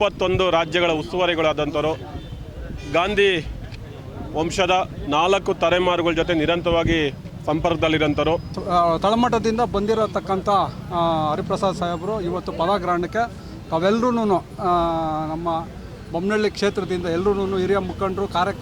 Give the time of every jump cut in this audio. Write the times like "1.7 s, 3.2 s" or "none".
8.5 s